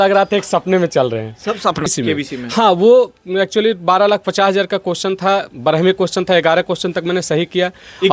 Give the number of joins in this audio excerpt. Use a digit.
1